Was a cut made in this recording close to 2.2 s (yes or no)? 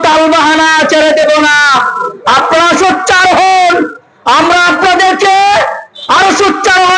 no